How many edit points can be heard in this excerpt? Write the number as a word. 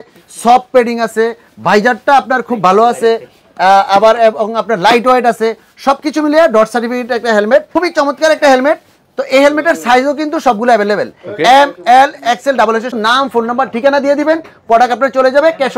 two